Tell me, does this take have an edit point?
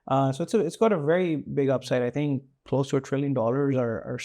no; 0 cuts

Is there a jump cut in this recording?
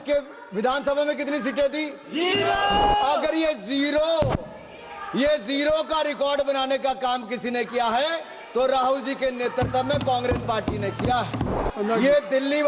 yes; 1 cut; at 11.6 s

